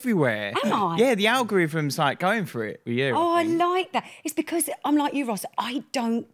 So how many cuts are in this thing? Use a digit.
0